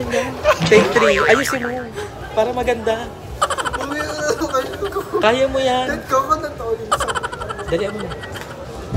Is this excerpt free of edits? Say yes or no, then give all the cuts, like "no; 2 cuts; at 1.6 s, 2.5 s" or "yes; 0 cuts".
yes; 0 cuts